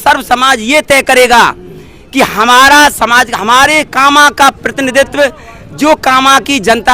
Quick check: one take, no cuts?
yes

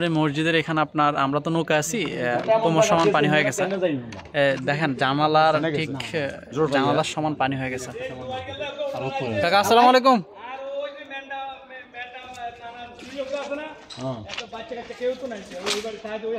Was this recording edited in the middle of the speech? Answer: no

